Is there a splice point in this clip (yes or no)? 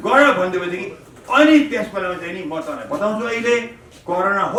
no